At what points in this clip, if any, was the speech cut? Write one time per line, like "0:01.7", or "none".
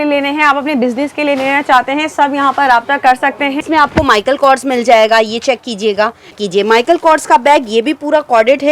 0:03.6
0:06.4